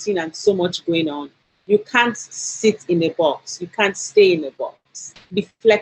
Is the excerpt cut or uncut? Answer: uncut